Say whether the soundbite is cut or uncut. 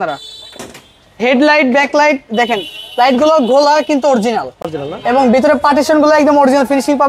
uncut